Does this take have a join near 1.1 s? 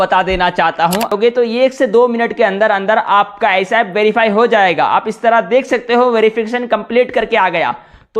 yes; 1 cut; at 1.1 s

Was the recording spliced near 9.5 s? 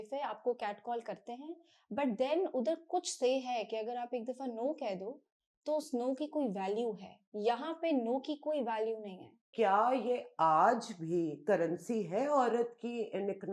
yes; 1 cut; at 9.5 s

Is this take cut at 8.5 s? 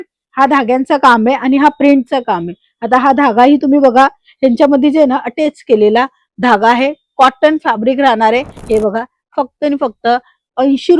yes; 1 cut; at 8.5 s

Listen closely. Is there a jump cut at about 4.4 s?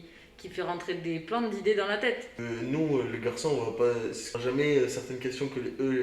yes; 2 cuts; at 2.3 s, 4.4 s

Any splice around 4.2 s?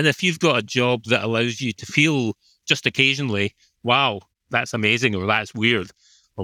yes; 1 cut; at 4.2 s

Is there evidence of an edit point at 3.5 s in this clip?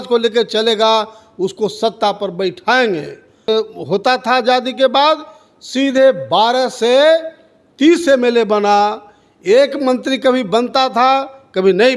yes; 1 cut; at 3.5 s

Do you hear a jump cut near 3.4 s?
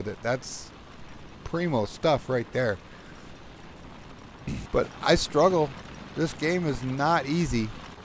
no; 1 cut; at 4.7 s

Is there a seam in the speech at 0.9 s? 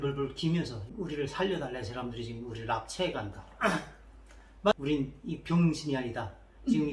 yes; 2 cuts; at 0.9 s, 4.7 s

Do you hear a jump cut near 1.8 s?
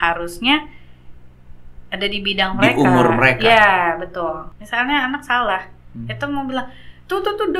no; 1 cut; at 4.5 s

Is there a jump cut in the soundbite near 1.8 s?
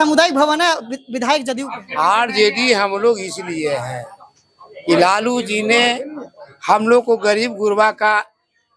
yes; 1 cut; at 1.8 s

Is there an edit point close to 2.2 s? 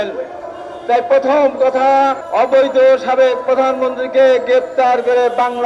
yes; 1 cut; at 2.2 s

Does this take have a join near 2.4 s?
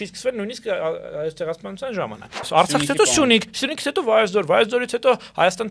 yes; 1 cut; at 2.4 s

